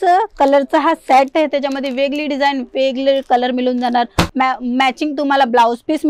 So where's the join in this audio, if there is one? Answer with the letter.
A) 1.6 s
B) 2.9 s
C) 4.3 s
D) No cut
C